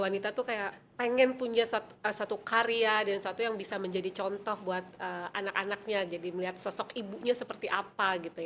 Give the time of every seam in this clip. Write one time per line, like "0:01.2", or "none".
none